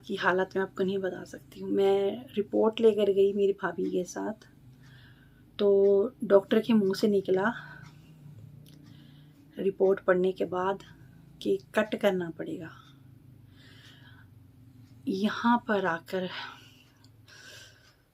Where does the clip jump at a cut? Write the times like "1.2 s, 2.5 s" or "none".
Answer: none